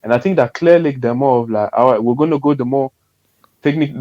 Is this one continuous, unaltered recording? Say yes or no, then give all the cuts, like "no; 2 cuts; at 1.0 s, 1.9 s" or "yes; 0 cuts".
yes; 0 cuts